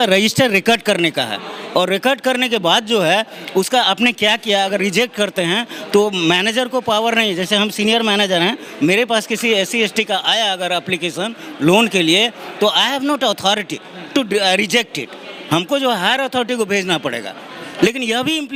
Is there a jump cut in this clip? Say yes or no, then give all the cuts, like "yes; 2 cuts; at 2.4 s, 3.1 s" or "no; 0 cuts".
no; 0 cuts